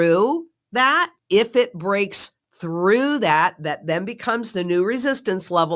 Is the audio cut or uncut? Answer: cut